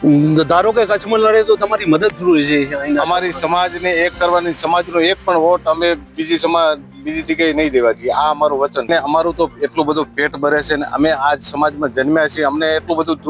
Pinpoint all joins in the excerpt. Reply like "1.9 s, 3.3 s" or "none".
8.9 s